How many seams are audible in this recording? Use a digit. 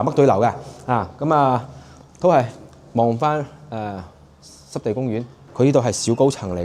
1